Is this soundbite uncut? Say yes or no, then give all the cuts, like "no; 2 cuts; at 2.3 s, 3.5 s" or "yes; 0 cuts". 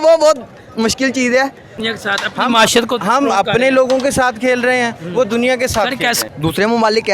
no; 2 cuts; at 1.8 s, 6.2 s